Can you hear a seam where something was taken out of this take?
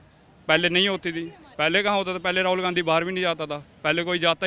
no; 0 cuts

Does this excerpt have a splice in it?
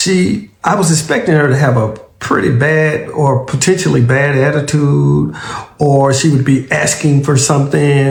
no; 0 cuts

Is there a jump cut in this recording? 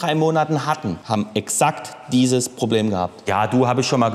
yes; 2 cuts; at 1.0 s, 3.2 s

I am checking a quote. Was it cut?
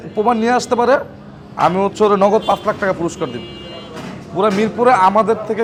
no; 0 cuts

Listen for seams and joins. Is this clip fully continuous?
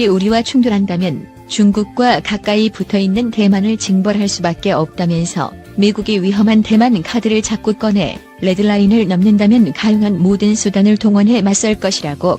yes; 0 cuts

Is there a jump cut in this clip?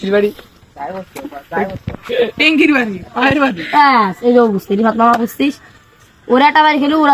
no; 0 cuts

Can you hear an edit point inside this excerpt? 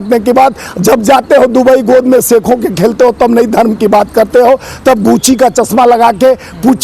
no; 0 cuts

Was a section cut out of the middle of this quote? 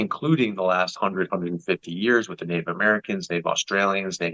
no; 0 cuts

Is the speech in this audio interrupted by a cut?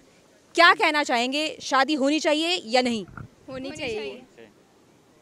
no; 0 cuts

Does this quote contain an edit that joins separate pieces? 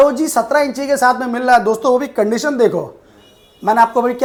no; 0 cuts

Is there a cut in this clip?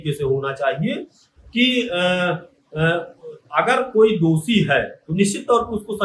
no; 0 cuts

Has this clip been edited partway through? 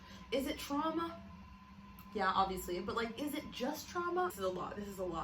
yes; 1 cut; at 4.3 s

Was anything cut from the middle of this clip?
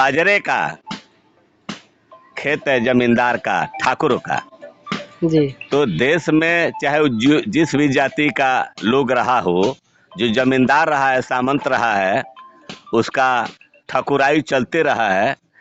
no; 0 cuts

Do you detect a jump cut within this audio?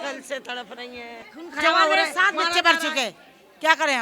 yes; 1 cut; at 1.2 s

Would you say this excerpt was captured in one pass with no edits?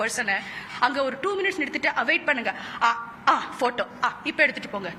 yes; 0 cuts

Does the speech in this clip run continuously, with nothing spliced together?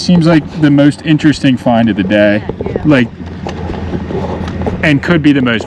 yes; 0 cuts

